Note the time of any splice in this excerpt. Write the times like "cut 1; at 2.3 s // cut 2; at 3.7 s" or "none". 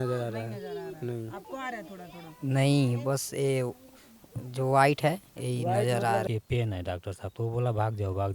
cut 1; at 6.2 s